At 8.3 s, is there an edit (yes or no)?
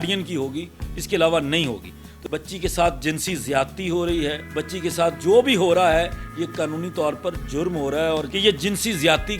yes